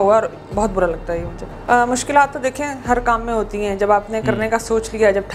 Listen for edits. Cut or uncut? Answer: cut